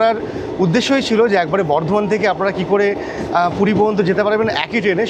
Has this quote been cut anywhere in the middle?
no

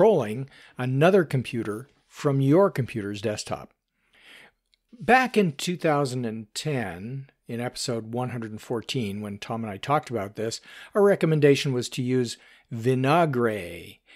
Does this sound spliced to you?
yes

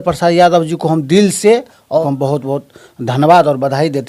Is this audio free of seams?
no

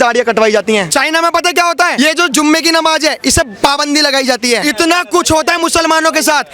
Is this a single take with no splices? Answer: no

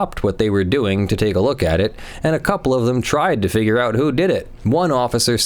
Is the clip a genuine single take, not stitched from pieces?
no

